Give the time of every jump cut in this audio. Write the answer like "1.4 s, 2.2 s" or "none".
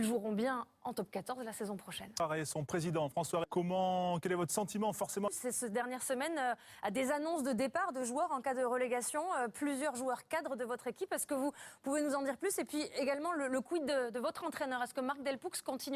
6.4 s